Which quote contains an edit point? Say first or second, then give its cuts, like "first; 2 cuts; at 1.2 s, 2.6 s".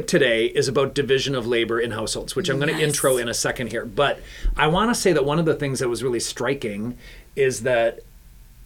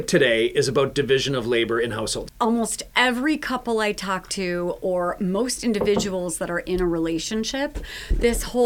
second; 1 cut; at 2.2 s